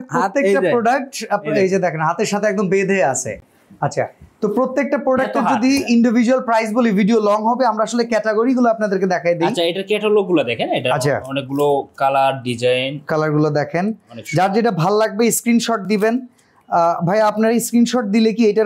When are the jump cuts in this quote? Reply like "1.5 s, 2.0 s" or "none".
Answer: none